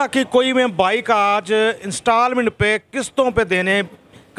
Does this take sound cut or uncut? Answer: uncut